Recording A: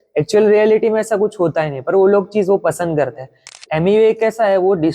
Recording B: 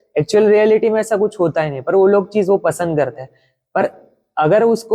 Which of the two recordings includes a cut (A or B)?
A